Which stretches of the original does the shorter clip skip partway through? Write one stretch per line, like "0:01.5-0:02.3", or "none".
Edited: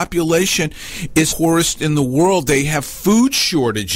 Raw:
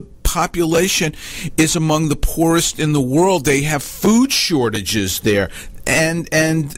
0:01.7-0:02.3